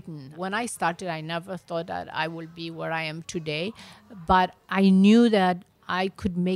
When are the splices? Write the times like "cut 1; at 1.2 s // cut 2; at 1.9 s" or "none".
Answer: none